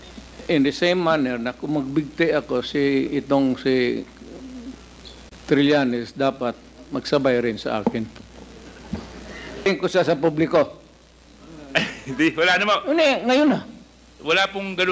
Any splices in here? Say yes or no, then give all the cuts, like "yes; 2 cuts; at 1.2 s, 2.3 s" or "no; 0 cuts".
yes; 1 cut; at 9.7 s